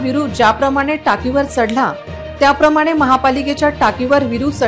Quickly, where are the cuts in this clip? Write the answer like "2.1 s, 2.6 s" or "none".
none